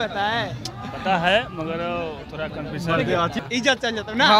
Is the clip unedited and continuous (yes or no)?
no